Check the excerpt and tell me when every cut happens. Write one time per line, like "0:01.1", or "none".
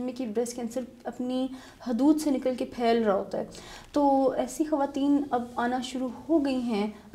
none